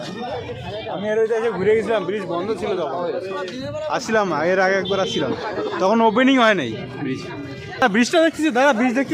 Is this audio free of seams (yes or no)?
no